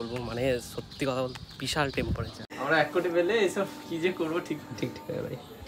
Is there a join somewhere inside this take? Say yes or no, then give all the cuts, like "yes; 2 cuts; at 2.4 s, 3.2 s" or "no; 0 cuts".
yes; 1 cut; at 2.6 s